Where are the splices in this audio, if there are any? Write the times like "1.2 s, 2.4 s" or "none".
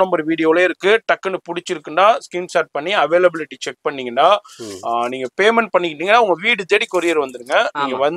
none

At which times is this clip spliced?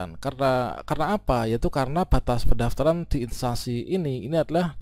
none

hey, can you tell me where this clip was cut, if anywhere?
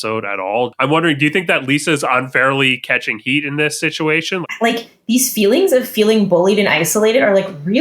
0.7 s, 4.4 s

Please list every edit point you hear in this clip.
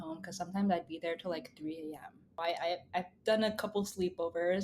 2.4 s

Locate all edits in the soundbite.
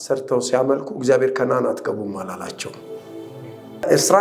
none

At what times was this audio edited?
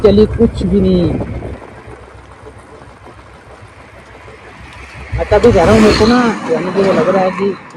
none

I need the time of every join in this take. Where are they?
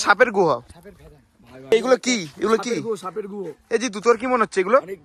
none

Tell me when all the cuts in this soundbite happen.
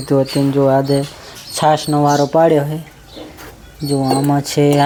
none

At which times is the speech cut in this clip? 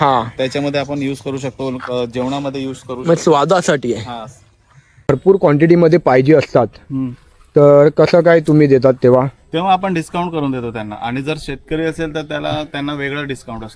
5.1 s

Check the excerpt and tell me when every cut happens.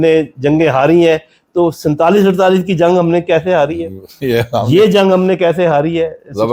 none

